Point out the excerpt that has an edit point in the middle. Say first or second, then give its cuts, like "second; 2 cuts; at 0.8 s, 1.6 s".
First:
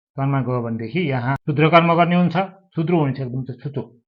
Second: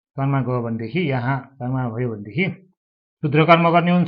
first; 1 cut; at 1.4 s